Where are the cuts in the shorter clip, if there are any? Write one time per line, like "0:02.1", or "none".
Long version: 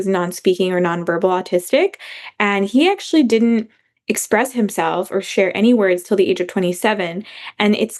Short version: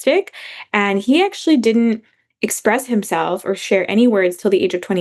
none